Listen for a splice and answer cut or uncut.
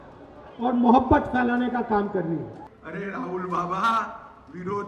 cut